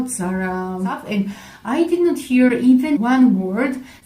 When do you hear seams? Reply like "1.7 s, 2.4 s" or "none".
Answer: 1.0 s